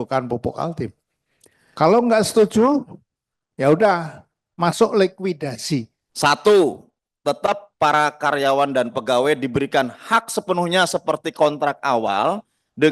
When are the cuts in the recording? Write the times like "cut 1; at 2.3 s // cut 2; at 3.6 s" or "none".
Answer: cut 1; at 6.0 s